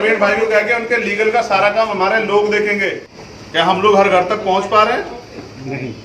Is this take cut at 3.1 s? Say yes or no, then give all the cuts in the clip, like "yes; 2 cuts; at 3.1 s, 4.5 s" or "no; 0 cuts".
yes; 1 cut; at 3.1 s